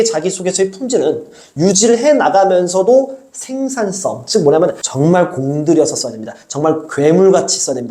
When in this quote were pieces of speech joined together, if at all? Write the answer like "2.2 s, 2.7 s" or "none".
4.8 s